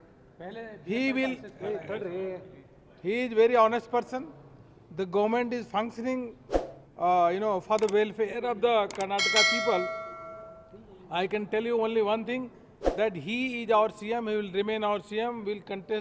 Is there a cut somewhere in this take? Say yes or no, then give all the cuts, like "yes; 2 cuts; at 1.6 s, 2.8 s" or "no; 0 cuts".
no; 0 cuts